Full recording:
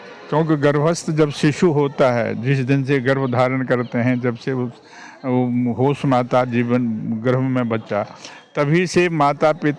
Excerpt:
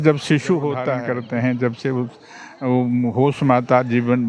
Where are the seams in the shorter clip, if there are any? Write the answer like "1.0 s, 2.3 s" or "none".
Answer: 0.9 s